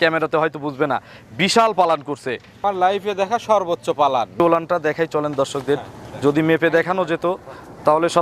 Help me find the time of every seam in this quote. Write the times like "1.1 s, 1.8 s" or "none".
2.6 s, 4.3 s